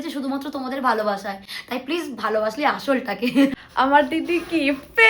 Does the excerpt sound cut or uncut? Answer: cut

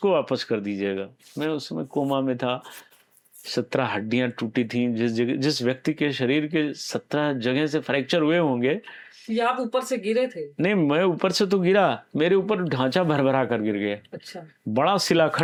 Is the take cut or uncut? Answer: uncut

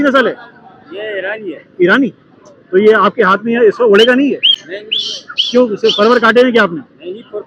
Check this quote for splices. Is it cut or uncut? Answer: uncut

